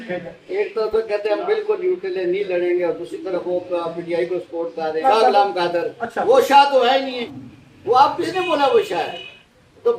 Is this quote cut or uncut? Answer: cut